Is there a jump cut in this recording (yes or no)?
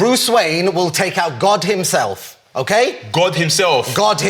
no